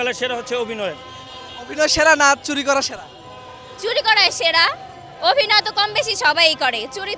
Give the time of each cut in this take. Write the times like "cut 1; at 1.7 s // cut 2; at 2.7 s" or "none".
none